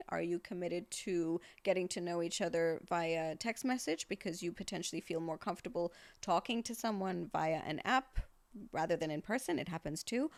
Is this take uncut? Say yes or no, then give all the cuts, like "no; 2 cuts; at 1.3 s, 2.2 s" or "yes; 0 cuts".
yes; 0 cuts